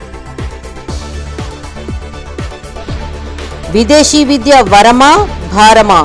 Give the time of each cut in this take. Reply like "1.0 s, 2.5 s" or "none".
3.3 s